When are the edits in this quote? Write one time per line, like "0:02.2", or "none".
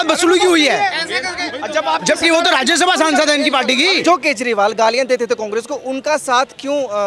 0:04.0